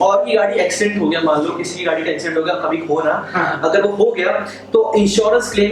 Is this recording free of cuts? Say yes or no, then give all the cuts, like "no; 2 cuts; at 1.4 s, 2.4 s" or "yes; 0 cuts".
yes; 0 cuts